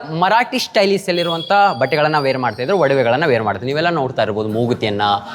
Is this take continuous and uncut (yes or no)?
yes